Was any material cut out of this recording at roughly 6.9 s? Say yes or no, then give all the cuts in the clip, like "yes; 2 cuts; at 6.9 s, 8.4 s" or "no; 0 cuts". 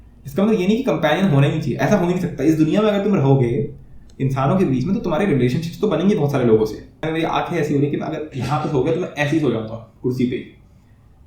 yes; 1 cut; at 6.9 s